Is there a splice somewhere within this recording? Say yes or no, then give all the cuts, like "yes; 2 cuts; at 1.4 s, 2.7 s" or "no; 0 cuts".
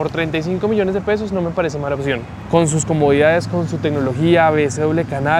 no; 0 cuts